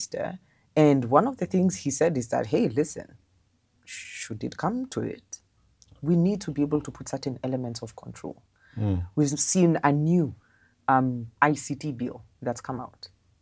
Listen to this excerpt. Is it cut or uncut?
uncut